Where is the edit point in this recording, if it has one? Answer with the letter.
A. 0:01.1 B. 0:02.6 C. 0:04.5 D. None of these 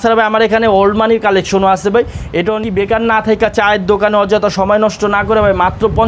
B